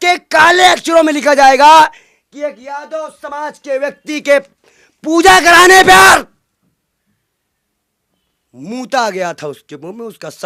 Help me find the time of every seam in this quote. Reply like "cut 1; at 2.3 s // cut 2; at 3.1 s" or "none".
none

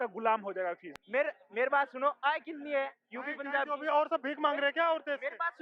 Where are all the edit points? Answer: cut 1; at 0.9 s

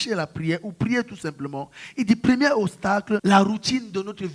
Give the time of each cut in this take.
cut 1; at 3.2 s

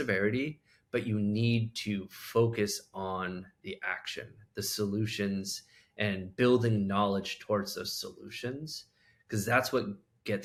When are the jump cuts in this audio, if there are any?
none

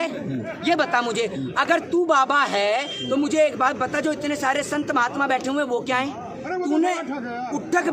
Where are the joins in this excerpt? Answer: none

